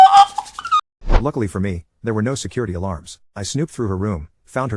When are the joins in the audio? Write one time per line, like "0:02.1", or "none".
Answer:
0:01.2